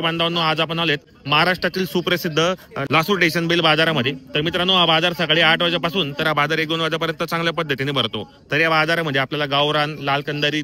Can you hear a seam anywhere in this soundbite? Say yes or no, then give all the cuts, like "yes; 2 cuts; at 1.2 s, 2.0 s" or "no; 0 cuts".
yes; 1 cut; at 2.7 s